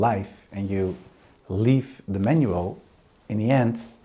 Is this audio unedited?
yes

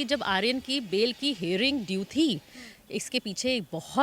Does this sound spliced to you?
no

